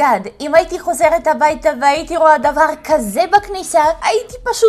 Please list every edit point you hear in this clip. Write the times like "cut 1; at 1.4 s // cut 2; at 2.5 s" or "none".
none